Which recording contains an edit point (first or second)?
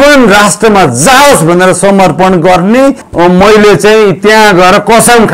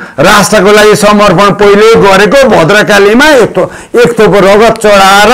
first